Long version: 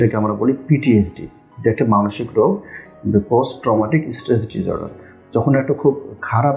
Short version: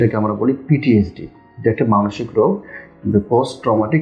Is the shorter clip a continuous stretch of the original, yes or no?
yes